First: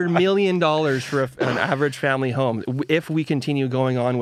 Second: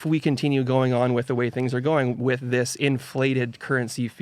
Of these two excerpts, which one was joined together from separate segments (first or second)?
second